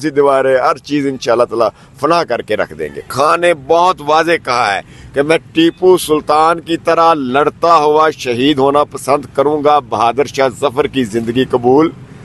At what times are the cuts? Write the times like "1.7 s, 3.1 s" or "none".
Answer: 3.1 s